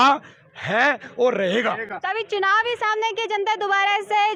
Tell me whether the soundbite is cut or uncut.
uncut